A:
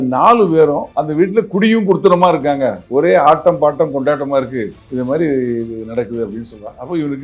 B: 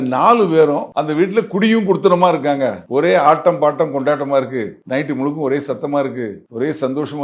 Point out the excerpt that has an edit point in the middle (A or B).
A